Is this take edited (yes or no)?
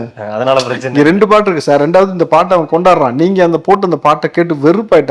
no